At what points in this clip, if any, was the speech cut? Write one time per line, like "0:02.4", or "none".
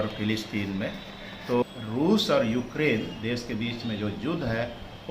0:01.6